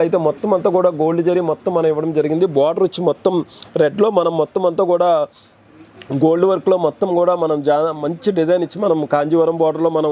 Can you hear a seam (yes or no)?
no